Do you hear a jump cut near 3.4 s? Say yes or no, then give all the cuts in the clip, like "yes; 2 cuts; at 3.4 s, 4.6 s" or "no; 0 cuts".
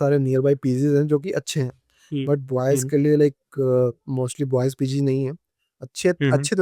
no; 0 cuts